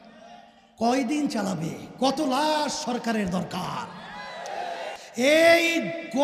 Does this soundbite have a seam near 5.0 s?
yes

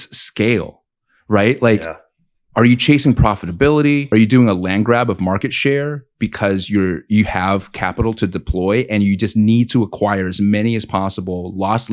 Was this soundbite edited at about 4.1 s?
yes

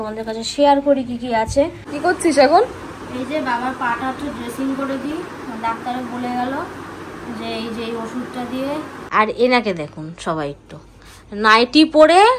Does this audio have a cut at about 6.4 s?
no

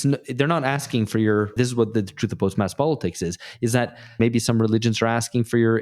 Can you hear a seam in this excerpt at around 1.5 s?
yes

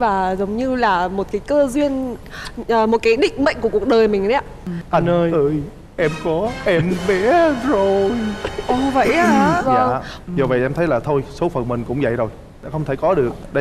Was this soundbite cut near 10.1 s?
yes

